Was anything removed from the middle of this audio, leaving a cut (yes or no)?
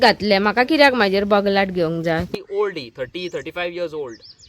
yes